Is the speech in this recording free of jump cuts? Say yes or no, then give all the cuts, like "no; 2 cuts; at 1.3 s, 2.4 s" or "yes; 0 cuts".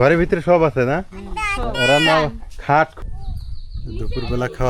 no; 1 cut; at 2.9 s